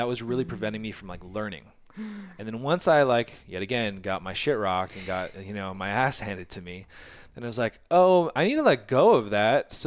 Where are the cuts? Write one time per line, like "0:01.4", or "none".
none